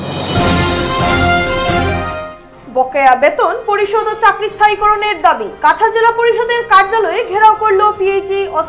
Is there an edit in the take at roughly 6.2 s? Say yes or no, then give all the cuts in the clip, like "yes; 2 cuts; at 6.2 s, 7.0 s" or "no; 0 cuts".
no; 1 cut; at 1.7 s